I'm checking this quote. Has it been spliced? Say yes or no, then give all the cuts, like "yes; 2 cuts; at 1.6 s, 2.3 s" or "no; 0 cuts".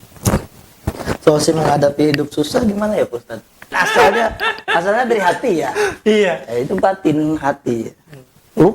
yes; 1 cut; at 3.8 s